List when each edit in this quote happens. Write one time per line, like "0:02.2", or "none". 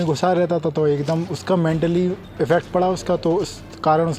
none